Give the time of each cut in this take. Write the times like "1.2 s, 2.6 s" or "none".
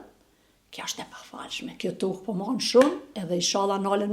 3.1 s

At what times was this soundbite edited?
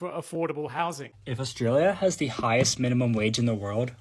1.1 s

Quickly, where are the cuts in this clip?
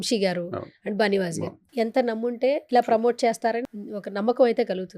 1.6 s, 2.6 s, 3.6 s

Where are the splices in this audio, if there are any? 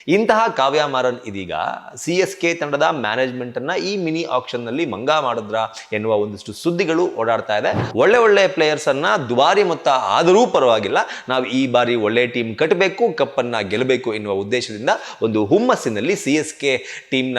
7.8 s

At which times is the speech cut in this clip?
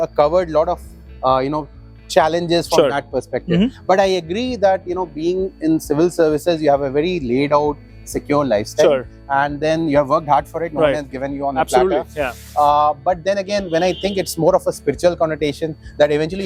none

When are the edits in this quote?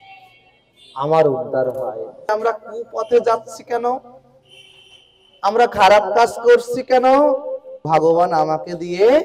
2.3 s, 7.8 s

